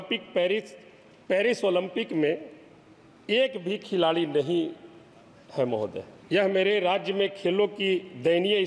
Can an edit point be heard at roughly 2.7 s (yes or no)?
no